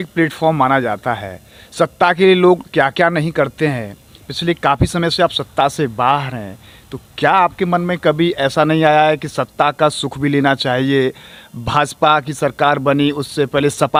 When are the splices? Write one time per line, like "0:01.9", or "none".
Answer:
none